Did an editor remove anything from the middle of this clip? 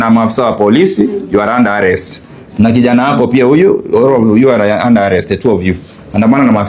no; 0 cuts

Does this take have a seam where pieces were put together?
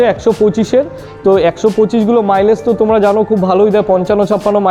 no; 0 cuts

